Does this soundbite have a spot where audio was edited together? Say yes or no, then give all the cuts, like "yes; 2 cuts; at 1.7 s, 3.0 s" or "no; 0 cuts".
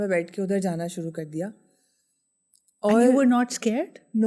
no; 0 cuts